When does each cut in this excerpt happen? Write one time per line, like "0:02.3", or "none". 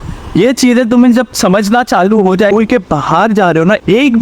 0:02.5

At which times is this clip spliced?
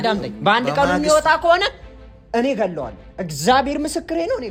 none

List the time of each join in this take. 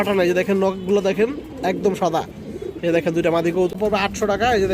0:03.7

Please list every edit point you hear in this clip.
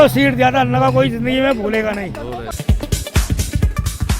0:02.5

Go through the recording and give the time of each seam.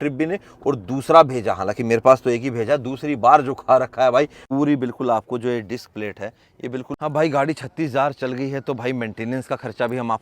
0:04.4
0:06.9

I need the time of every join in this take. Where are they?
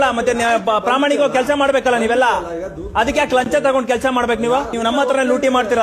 0:04.7

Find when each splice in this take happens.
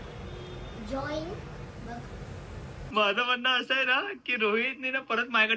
0:02.8

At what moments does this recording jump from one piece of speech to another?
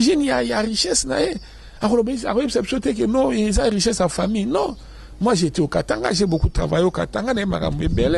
none

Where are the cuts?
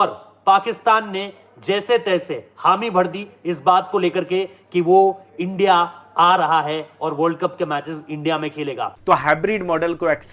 0:08.9

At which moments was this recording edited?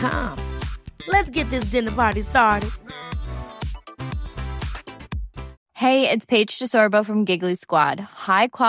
0:05.6

